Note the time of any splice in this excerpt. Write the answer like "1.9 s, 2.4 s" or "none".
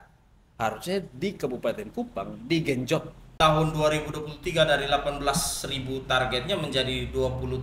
3.3 s